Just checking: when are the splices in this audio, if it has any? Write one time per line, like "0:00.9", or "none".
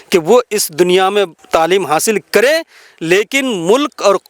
0:01.4